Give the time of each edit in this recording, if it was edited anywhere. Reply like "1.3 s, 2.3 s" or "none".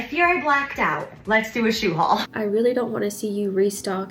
2.3 s